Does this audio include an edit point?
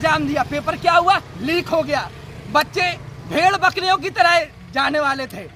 no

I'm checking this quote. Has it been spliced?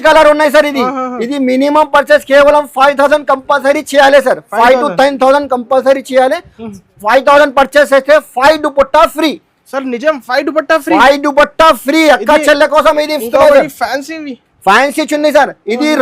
no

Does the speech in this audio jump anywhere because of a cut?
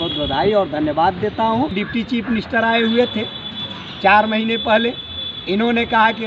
yes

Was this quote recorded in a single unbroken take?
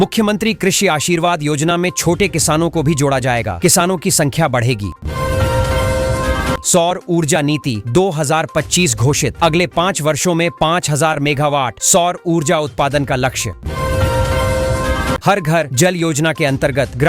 no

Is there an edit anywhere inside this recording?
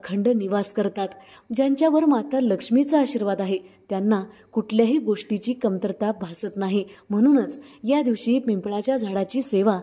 yes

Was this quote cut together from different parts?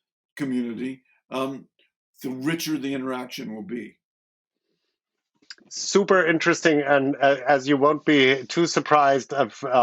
no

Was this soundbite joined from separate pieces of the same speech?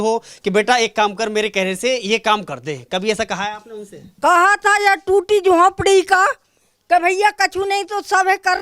no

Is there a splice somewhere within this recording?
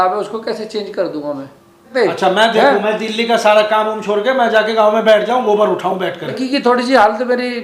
yes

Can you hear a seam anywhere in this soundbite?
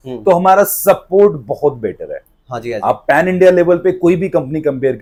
no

